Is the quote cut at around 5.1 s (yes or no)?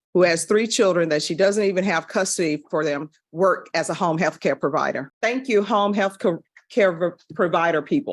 no